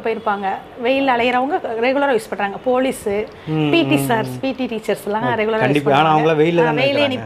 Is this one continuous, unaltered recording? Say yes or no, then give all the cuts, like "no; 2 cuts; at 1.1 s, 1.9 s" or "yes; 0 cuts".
yes; 0 cuts